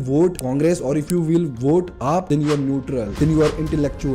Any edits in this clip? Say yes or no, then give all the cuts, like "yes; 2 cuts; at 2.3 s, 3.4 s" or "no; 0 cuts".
no; 0 cuts